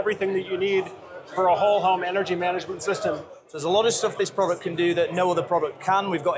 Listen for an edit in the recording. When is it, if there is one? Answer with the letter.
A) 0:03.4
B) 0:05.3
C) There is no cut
A